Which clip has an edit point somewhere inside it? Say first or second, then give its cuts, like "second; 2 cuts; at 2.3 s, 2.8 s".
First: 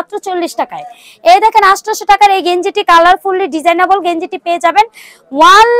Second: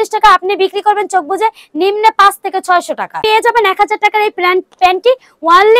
second; 1 cut; at 3.2 s